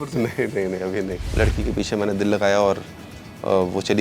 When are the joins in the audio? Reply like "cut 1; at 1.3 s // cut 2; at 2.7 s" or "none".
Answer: cut 1; at 1.2 s